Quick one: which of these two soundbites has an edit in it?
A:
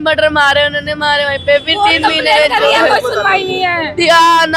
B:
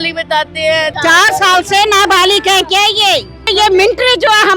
B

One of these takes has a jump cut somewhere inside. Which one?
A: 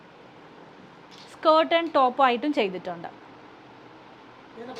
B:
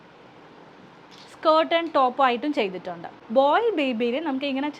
B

